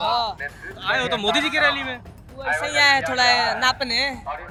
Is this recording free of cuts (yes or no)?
yes